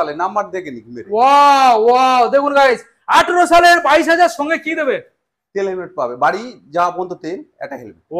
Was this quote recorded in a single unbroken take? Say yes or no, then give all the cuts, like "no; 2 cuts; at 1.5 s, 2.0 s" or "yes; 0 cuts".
yes; 0 cuts